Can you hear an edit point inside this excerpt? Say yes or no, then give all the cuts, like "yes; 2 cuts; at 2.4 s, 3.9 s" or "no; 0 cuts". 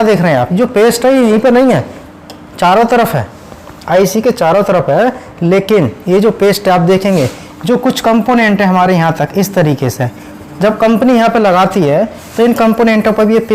no; 0 cuts